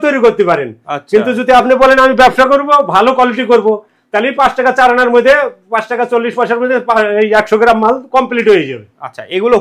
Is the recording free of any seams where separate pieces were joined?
yes; 0 cuts

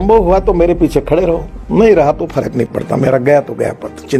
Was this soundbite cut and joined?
no; 0 cuts

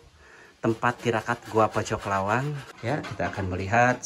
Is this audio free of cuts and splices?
no; 1 cut; at 2.7 s

